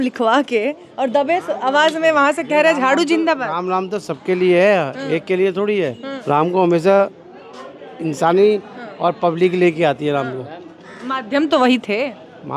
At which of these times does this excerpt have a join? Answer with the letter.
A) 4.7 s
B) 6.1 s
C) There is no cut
B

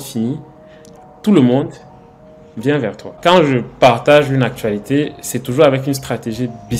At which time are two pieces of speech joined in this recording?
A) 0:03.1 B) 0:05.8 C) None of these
A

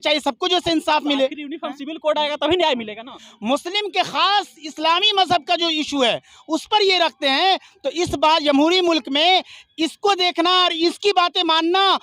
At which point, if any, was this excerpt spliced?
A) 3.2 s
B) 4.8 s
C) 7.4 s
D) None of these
A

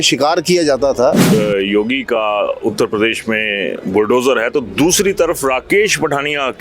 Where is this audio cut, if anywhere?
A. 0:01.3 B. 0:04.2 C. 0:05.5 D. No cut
A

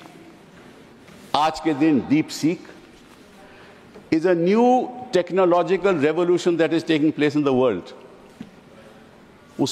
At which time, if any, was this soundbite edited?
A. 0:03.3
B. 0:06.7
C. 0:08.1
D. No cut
D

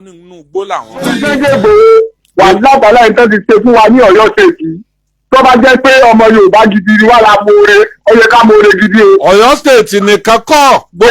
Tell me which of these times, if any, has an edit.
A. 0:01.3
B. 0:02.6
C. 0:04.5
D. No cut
A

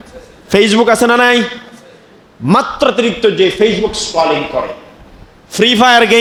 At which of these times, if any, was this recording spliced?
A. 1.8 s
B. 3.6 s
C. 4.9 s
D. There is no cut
D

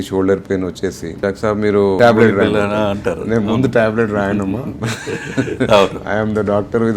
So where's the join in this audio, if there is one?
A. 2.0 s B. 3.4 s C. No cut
A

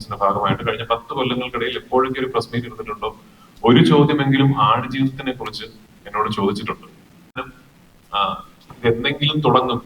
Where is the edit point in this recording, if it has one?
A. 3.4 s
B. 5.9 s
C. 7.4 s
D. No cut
C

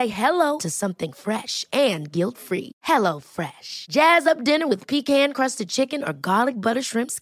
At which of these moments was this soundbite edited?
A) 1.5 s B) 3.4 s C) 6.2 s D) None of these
D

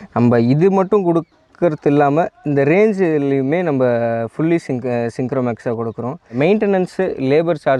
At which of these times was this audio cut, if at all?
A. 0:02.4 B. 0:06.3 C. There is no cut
B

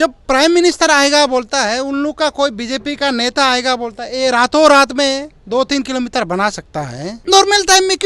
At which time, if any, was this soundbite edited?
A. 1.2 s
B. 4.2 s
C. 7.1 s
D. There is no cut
C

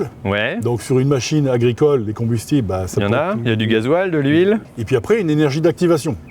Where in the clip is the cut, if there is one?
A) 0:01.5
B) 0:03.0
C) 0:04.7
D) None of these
C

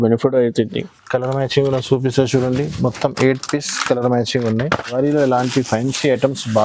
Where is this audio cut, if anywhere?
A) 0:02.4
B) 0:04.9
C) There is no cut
B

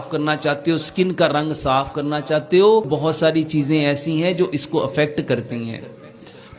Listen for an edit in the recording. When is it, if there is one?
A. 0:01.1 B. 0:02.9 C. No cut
B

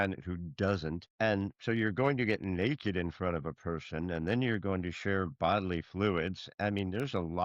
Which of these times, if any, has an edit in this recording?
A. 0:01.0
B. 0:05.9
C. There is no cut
A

